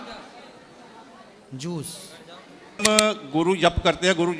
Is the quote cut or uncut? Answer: cut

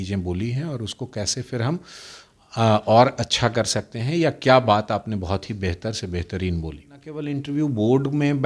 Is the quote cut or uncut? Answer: cut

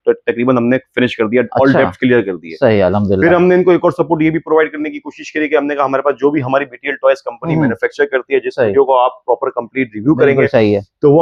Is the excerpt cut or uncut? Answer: uncut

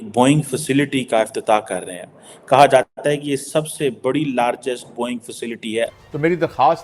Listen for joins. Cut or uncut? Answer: cut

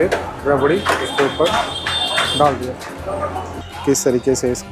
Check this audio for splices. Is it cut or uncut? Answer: cut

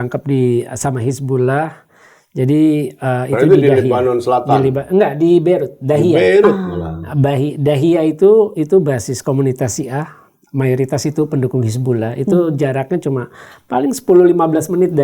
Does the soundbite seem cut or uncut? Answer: uncut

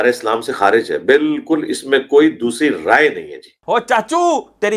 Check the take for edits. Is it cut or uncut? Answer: cut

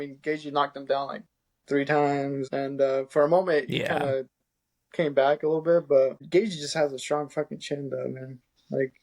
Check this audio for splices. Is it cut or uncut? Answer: cut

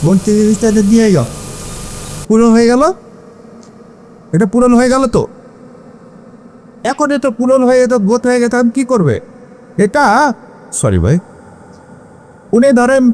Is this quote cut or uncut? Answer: uncut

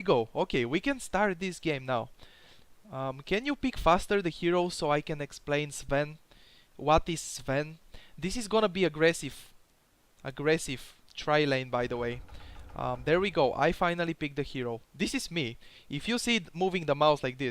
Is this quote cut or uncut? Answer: cut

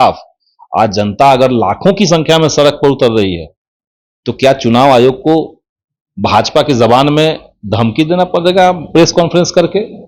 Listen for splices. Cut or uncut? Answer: uncut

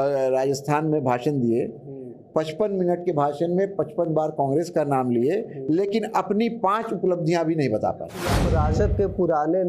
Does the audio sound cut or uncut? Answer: cut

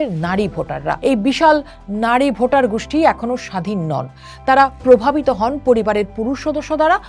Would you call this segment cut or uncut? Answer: cut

